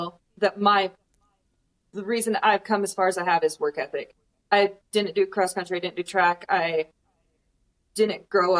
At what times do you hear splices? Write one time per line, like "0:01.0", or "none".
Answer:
none